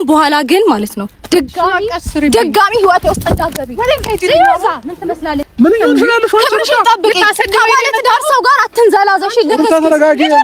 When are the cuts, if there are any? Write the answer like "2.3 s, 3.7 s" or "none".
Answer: 5.4 s